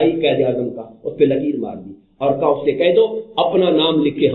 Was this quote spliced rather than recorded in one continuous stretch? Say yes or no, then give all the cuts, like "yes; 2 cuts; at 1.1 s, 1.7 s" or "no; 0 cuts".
no; 0 cuts